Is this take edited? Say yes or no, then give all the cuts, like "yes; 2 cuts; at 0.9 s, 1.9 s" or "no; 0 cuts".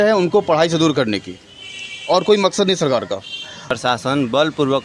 yes; 1 cut; at 3.7 s